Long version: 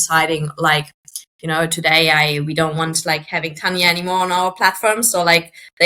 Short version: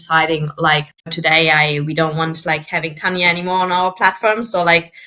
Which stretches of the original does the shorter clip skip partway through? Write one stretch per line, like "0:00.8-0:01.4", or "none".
0:01.1-0:01.7